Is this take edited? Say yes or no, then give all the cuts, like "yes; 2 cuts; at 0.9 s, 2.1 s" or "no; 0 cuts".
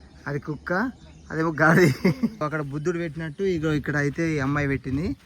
yes; 1 cut; at 2.4 s